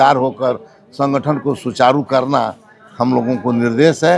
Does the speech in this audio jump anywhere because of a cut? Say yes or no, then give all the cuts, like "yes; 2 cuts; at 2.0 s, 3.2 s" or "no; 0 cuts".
no; 0 cuts